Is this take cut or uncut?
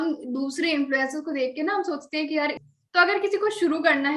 cut